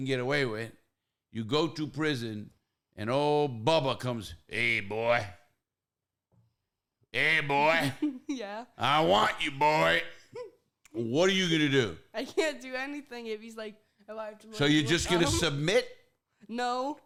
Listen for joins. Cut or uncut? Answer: uncut